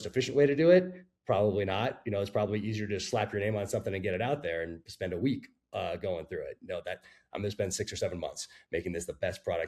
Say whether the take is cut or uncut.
uncut